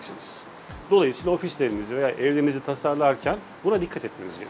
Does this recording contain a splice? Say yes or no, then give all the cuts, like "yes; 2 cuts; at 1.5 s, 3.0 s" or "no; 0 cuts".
no; 0 cuts